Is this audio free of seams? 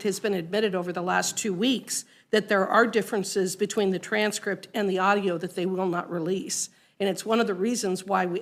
yes; 0 cuts

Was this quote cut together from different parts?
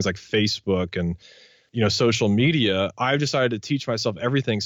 yes; 1 cut; at 1.4 s

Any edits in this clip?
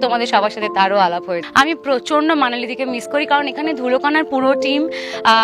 yes; 1 cut; at 1.3 s

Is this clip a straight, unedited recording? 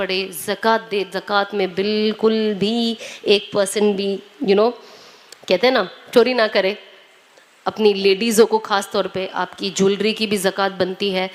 yes; 0 cuts

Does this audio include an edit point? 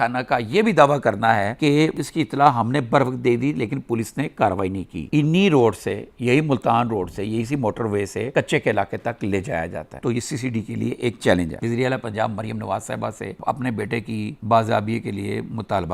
yes; 3 cuts; at 5.1 s, 10.0 s, 11.5 s

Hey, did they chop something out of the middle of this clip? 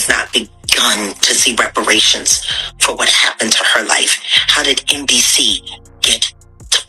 no; 0 cuts

